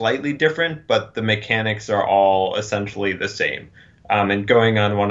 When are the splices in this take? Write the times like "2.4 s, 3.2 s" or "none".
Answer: none